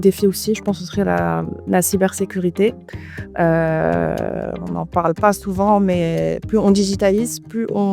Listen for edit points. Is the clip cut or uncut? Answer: uncut